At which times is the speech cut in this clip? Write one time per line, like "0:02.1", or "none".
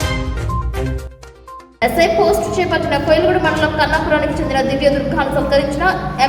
0:01.7